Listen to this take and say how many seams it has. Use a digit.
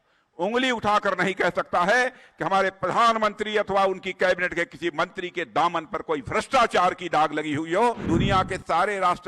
1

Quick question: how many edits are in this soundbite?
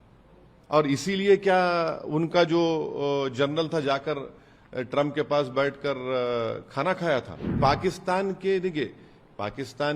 1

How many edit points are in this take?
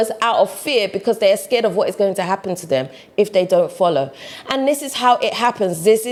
0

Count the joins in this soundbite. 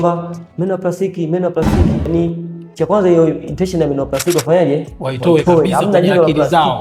0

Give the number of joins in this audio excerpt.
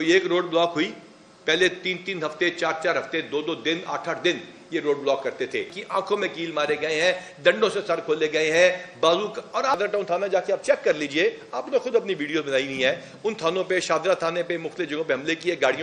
2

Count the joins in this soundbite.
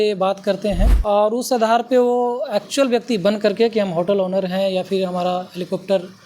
1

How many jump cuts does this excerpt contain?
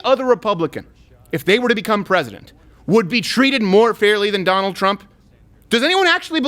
0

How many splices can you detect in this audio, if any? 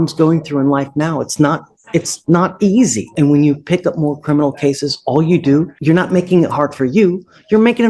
2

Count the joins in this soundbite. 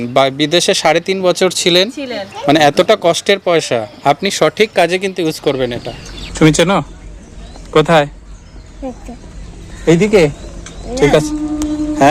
1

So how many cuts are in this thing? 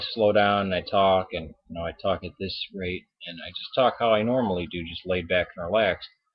1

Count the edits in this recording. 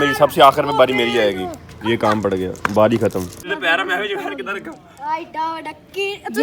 1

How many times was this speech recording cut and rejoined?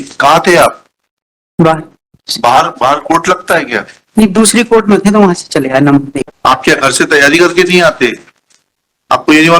1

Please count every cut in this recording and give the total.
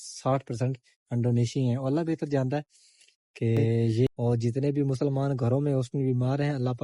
1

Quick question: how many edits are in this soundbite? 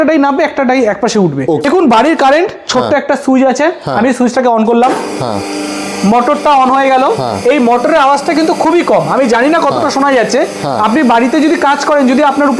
1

